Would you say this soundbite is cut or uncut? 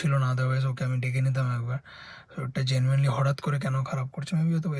uncut